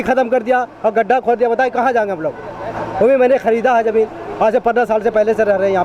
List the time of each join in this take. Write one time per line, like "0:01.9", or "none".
none